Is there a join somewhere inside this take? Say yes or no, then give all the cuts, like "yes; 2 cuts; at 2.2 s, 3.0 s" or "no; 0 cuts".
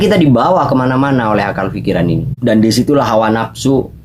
yes; 1 cut; at 2.3 s